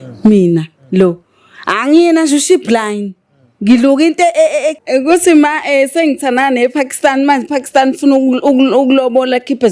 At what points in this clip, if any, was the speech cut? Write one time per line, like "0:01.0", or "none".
0:04.8